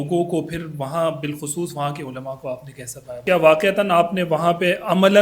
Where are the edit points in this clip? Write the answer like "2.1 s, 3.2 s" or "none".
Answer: 3.2 s